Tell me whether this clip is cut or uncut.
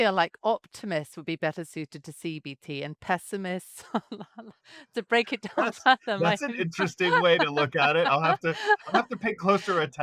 uncut